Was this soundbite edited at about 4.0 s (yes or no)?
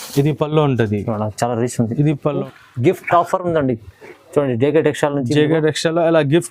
no